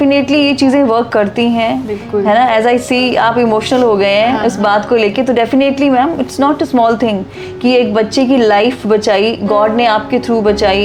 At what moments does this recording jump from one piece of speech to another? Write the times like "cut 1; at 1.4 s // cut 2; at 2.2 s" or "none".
none

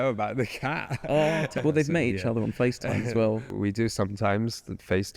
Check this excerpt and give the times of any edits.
cut 1; at 1.6 s // cut 2; at 3.5 s

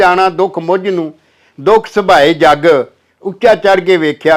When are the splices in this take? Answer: none

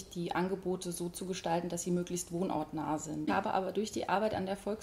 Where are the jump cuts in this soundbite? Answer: cut 1; at 3.3 s

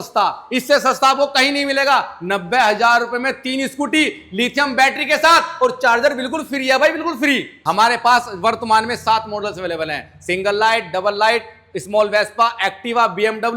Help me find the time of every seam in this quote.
cut 1; at 7.5 s

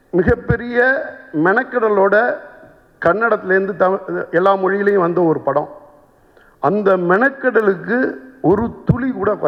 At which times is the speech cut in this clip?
none

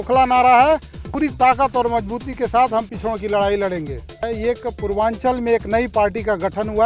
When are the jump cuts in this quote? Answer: cut 1; at 1.1 s // cut 2; at 4.2 s

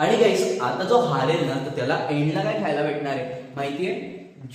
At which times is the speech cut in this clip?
none

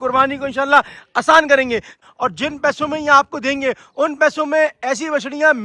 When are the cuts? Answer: cut 1; at 2.0 s

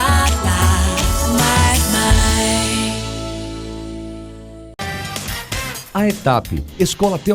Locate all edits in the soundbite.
cut 1; at 4.6 s

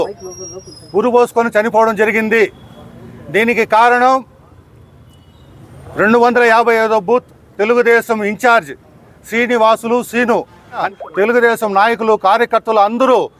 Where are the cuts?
cut 1; at 10.9 s

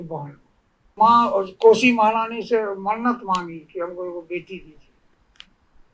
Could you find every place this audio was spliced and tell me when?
cut 1; at 0.9 s

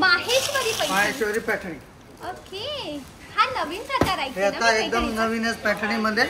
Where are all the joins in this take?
none

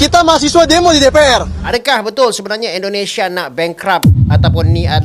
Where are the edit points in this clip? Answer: cut 1; at 1.7 s

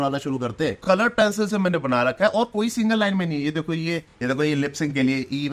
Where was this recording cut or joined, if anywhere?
cut 1; at 0.8 s // cut 2; at 4.1 s

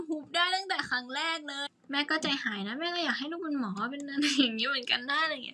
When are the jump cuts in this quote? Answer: cut 1; at 1.6 s

